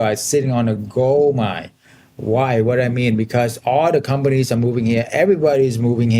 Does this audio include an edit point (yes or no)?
no